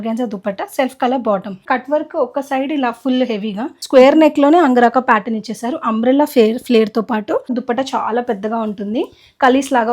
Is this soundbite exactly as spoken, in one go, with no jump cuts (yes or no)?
no